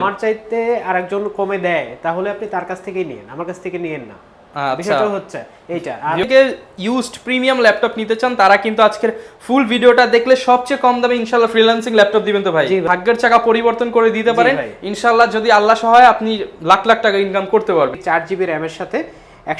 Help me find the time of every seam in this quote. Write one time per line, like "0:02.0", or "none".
0:06.2
0:12.8
0:18.0